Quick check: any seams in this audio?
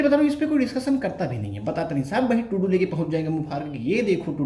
no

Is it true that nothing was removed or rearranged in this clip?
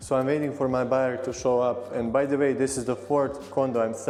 yes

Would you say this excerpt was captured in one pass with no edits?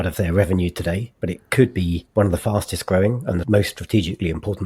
no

